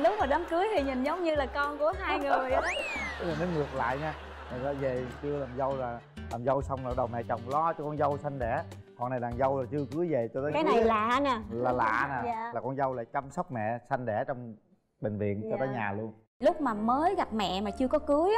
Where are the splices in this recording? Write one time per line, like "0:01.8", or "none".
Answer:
0:03.1
0:16.4